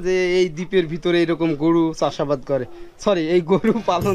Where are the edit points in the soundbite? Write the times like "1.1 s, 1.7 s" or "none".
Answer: none